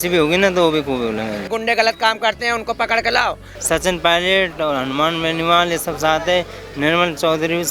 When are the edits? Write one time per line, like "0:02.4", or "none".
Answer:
0:01.5
0:03.5